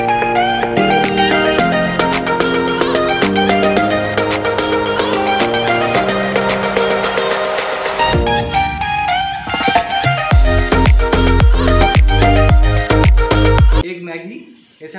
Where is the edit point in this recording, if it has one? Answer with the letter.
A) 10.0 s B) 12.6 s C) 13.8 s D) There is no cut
C